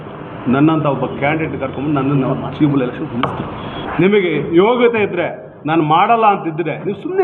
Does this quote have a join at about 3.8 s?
yes; 1 cut; at 3.8 s

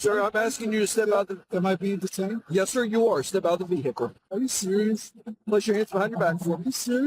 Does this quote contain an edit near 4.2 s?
yes; 1 cut; at 4.2 s

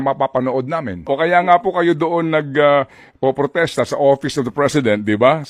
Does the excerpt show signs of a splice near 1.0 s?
yes; 1 cut; at 1.0 s

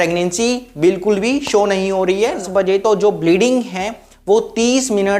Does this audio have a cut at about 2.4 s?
yes; 1 cut; at 2.4 s

